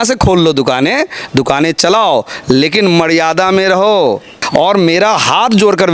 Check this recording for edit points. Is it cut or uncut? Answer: cut